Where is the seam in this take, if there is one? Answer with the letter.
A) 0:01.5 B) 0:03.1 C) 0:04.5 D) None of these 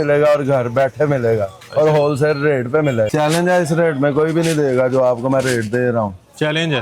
B